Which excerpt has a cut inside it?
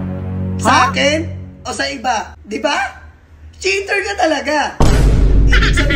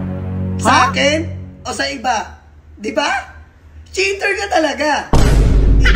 first; 1 cut; at 2.4 s

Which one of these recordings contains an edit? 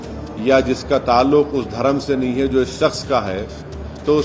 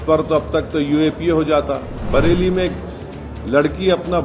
second; 1 cut; at 2.0 s

